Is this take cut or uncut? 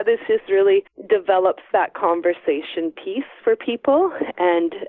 cut